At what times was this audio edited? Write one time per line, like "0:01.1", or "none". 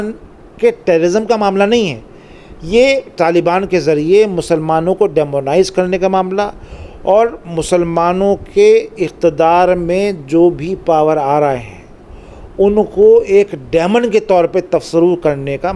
none